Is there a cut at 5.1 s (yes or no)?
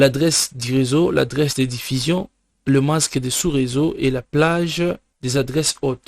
yes